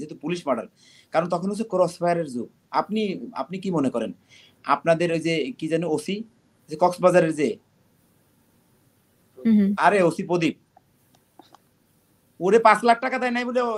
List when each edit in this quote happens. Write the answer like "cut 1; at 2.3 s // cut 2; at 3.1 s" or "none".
none